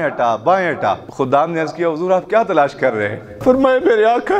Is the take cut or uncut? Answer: cut